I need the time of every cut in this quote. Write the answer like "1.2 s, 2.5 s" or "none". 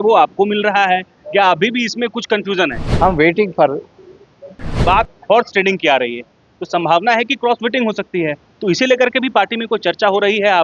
2.8 s, 4.7 s